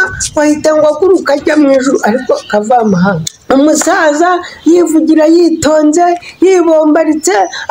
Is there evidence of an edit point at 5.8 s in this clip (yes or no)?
no